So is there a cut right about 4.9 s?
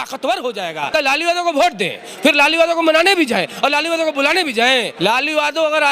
yes; 2 cuts; at 0.9 s, 4.9 s

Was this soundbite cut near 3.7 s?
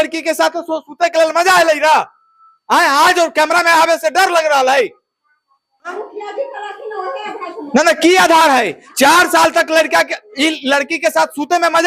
no; 1 cut; at 5.9 s

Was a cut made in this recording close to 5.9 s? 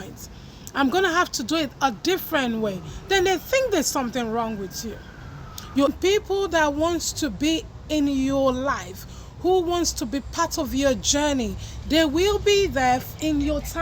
yes; 1 cut; at 5.9 s

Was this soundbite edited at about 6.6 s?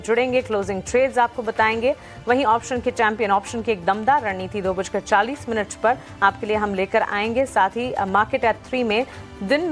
yes; 1 cut; at 6.6 s

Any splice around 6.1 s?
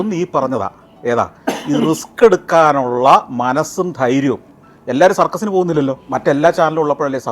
yes; 1 cut; at 6.1 s

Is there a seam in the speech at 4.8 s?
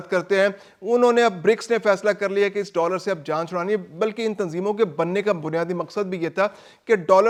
no; 0 cuts

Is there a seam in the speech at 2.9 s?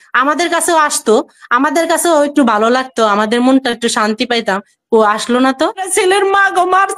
no; 1 cut; at 5.9 s

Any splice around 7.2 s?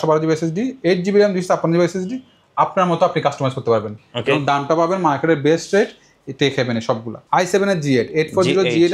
yes; 1 cut; at 7.2 s

